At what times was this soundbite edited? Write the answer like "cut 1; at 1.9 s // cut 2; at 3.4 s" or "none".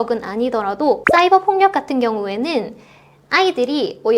cut 1; at 1.0 s